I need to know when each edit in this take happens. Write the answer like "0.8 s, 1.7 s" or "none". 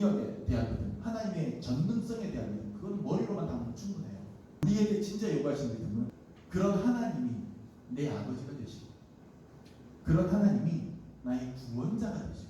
4.6 s, 6.1 s